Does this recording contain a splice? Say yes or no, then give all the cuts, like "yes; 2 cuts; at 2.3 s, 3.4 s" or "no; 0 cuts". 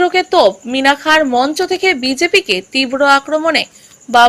no; 0 cuts